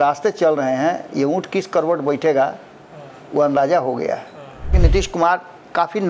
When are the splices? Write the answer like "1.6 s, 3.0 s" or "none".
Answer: 4.8 s